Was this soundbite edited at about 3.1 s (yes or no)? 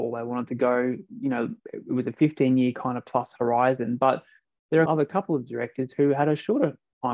no